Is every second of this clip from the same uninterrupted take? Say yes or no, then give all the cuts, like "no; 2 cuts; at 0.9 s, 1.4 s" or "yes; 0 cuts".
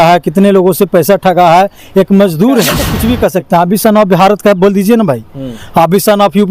no; 1 cut; at 2.9 s